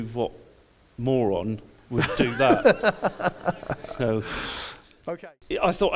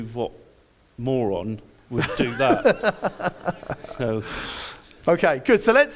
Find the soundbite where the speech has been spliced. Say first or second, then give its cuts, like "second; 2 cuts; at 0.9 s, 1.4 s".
first; 1 cut; at 5.0 s